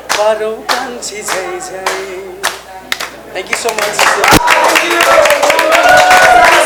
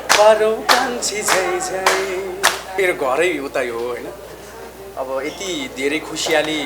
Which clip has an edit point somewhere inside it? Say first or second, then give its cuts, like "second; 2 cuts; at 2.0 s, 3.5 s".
second; 1 cut; at 2.6 s